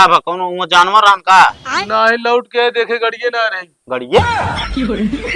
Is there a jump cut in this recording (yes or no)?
yes